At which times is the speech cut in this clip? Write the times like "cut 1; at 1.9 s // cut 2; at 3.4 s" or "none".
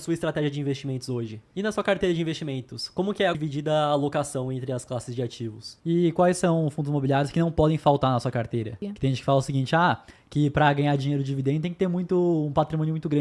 cut 1; at 1.4 s // cut 2; at 3.4 s // cut 3; at 5.7 s // cut 4; at 8.9 s